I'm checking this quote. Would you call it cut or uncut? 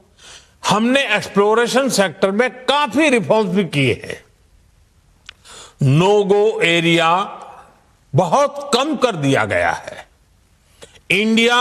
cut